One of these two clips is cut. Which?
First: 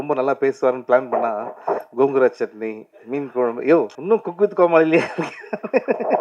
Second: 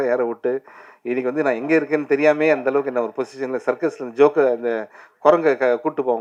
first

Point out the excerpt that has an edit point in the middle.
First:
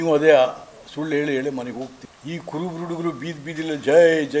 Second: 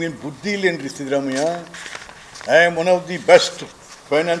first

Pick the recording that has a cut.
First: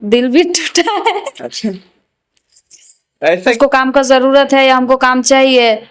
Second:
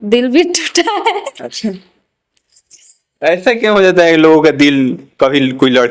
first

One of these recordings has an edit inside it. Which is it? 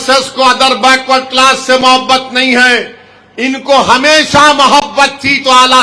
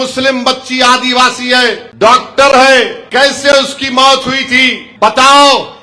second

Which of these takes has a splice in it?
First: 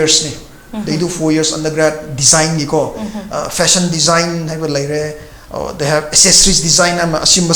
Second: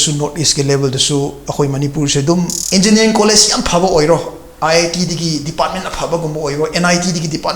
second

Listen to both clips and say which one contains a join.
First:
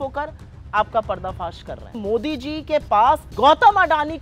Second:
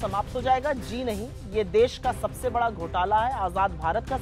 first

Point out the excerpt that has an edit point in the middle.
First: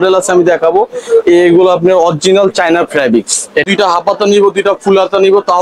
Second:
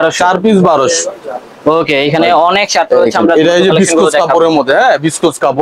first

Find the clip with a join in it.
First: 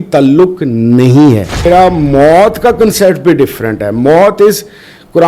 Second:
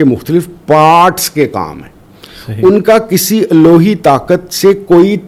first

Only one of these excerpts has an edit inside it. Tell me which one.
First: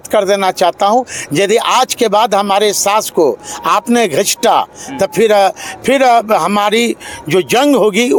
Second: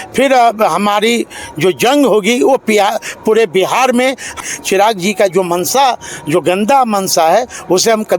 second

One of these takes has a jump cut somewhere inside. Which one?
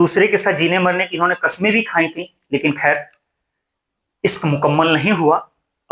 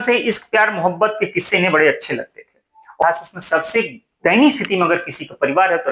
second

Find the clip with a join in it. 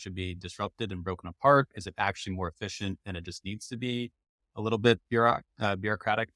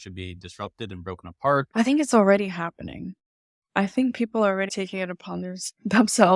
second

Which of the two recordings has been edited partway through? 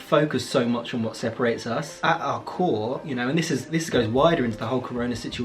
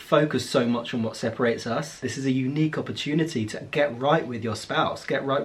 second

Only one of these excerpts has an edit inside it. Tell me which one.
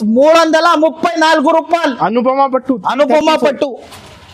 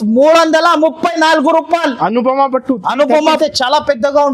second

